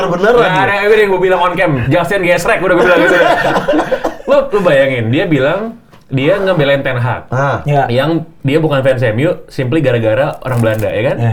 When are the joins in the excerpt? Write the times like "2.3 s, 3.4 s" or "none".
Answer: none